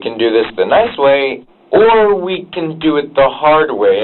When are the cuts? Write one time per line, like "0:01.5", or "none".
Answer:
0:01.4